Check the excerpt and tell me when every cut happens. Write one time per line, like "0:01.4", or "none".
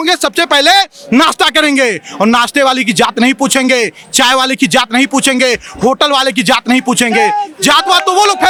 none